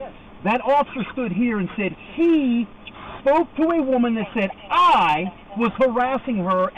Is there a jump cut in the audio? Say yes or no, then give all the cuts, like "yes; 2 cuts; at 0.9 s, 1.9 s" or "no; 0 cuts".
no; 0 cuts